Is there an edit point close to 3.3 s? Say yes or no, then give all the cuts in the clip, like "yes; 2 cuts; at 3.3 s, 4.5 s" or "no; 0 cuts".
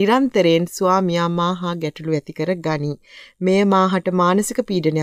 no; 0 cuts